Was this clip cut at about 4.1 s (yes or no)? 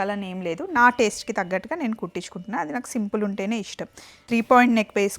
yes